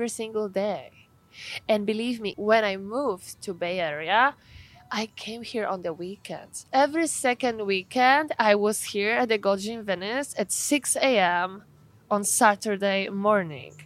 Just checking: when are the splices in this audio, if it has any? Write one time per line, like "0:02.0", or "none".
0:02.3
0:06.6